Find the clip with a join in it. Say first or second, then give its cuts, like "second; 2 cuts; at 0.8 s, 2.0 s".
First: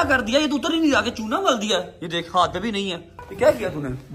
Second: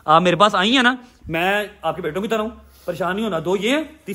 first; 1 cut; at 3.2 s